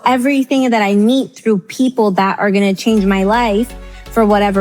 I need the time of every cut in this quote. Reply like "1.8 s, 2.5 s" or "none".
none